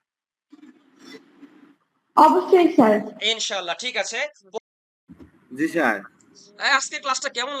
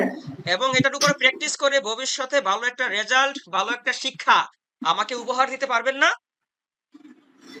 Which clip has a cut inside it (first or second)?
first